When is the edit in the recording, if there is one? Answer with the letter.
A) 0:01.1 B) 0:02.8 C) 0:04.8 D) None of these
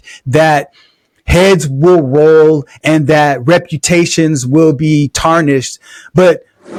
D